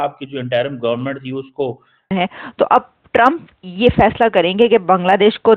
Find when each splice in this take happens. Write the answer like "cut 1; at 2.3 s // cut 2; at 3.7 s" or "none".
cut 1; at 2.1 s